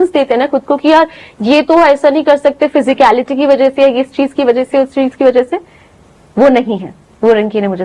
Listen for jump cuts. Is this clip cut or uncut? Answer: uncut